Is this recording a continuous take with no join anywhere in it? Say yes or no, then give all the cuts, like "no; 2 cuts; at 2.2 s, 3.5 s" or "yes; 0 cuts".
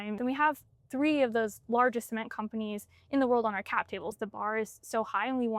no; 1 cut; at 4.2 s